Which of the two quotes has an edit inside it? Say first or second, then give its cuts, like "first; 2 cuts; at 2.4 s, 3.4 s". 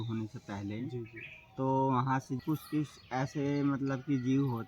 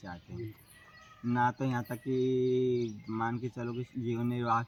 first; 1 cut; at 2.3 s